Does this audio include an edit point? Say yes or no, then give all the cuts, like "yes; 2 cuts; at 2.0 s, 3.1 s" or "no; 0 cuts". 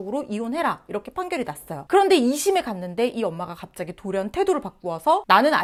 no; 0 cuts